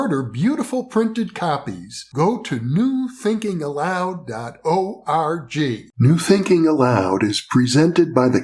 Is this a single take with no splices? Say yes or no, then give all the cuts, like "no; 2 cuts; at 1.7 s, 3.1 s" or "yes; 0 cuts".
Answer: no; 1 cut; at 5.9 s